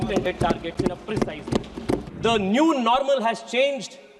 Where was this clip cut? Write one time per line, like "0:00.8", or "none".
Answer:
0:02.1